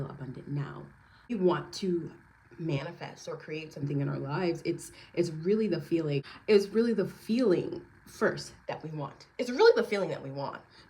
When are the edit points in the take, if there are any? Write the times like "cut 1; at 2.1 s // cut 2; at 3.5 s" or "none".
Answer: cut 1; at 1.3 s // cut 2; at 6.3 s